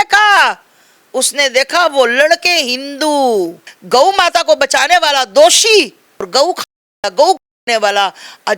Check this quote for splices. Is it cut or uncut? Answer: cut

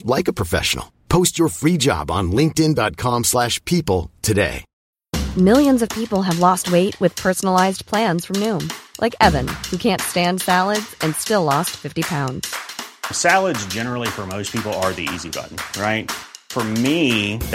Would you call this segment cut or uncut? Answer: uncut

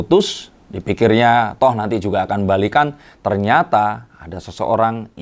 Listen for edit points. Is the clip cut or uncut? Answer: uncut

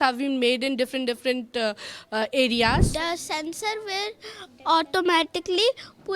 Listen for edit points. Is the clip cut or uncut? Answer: cut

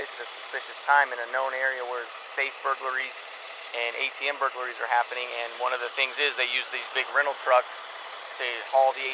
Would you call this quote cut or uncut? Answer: uncut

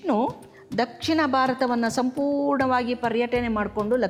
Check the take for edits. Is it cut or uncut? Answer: uncut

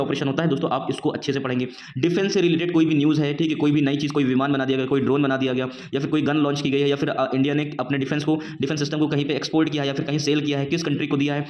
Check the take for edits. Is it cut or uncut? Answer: uncut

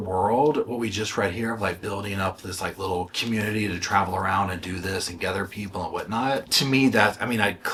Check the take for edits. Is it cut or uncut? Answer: uncut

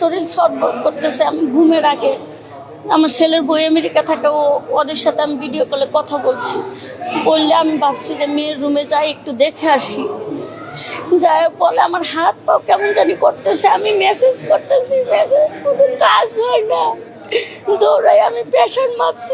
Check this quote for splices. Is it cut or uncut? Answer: uncut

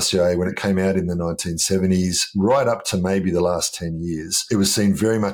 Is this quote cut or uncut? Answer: cut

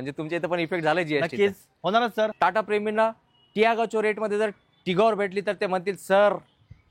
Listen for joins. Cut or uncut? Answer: cut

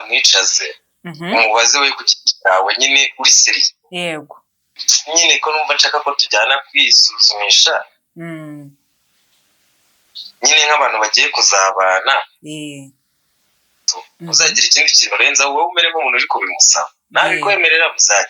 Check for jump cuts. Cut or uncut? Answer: cut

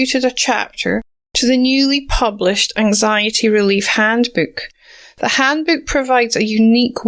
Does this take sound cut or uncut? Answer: uncut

